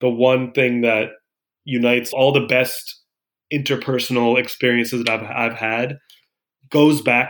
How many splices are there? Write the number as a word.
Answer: one